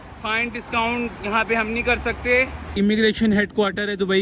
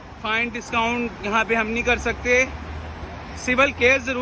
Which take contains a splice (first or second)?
first